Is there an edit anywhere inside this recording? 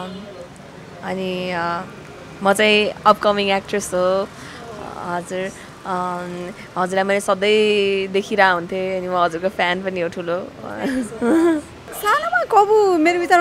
yes; 1 cut; at 11.8 s

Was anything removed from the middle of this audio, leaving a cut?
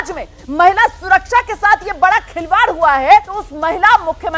yes; 1 cut; at 3.4 s

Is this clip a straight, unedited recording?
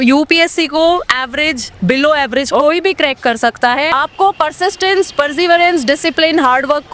no; 1 cut; at 3.9 s

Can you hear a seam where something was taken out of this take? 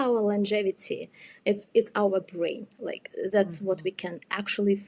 no; 0 cuts

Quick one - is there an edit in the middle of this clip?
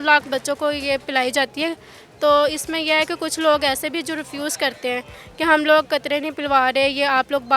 no; 0 cuts

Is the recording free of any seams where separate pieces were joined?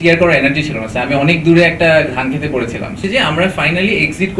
no; 1 cut; at 3.0 s

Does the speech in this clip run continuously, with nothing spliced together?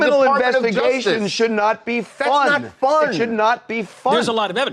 yes; 0 cuts

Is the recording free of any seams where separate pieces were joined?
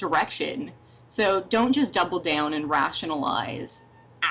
yes; 0 cuts

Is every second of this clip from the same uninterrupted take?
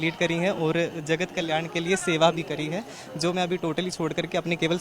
yes; 0 cuts

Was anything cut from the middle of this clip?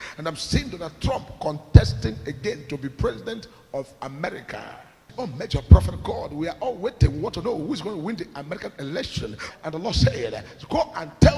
yes; 2 cuts; at 5.0 s, 9.4 s

